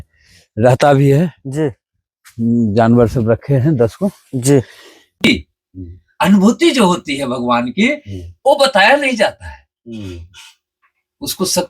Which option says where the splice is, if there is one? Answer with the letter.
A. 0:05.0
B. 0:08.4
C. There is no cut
A